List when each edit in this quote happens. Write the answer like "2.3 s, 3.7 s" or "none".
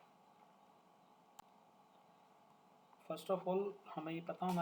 1.4 s